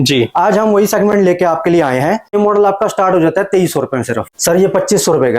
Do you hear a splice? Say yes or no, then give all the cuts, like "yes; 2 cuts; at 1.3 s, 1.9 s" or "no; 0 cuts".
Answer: yes; 2 cuts; at 2.3 s, 4.3 s